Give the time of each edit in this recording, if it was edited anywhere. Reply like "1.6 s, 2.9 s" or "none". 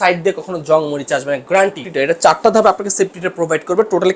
1.9 s